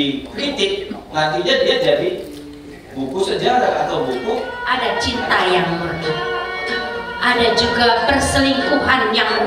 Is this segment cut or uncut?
cut